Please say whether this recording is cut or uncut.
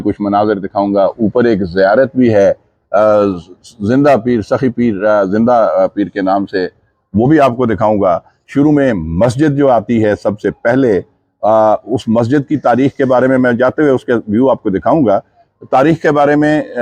uncut